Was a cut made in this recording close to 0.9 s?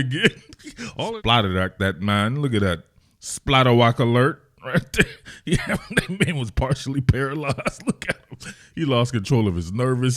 yes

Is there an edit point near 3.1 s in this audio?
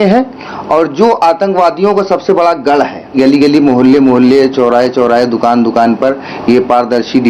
yes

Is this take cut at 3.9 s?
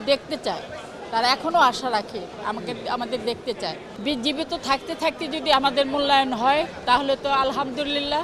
yes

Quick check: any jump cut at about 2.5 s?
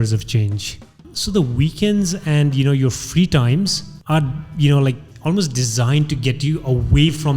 no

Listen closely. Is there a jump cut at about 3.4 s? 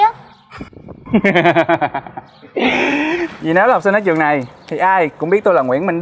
yes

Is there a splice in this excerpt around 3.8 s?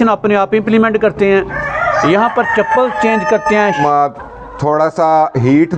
yes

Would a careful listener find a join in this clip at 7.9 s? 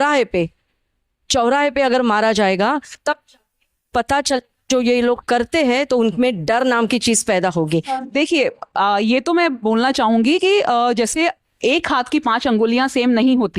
yes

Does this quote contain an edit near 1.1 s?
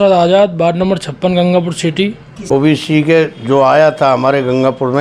no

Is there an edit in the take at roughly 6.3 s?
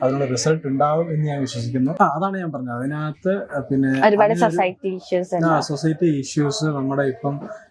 no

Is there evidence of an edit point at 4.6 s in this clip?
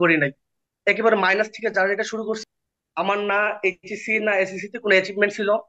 no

